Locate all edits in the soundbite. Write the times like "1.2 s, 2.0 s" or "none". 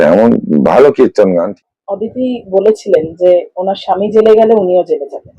1.6 s